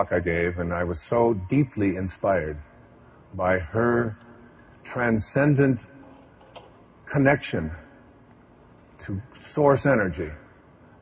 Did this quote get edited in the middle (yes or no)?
no